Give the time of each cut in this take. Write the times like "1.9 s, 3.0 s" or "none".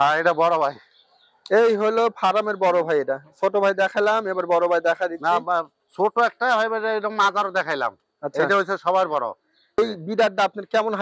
9.8 s